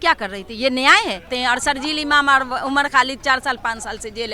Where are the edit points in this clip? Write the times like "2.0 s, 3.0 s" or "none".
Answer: 1.3 s